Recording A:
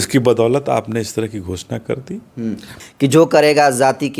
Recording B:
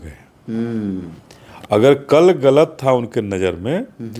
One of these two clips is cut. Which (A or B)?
A